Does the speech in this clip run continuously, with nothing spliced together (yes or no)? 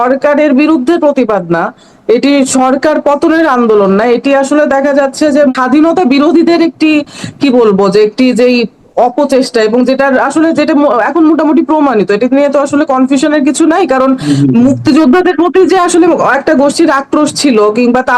no